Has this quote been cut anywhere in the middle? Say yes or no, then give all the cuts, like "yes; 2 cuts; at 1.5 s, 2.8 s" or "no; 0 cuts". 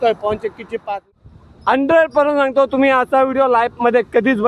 yes; 1 cut; at 1.1 s